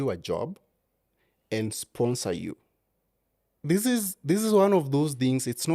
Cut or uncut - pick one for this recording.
cut